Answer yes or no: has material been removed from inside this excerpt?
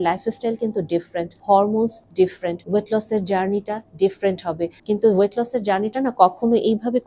yes